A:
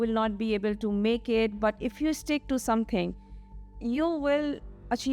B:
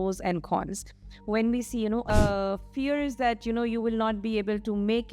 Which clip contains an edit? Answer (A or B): B